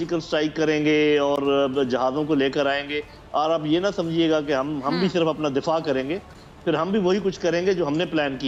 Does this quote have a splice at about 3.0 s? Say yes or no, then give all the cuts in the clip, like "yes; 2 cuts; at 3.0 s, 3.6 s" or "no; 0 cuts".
no; 0 cuts